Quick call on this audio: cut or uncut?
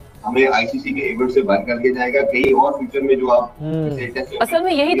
uncut